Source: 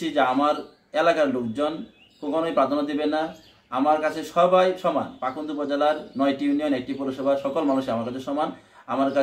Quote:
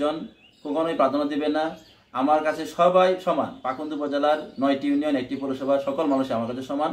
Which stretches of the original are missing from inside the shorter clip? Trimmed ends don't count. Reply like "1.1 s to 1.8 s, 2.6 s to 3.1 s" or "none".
none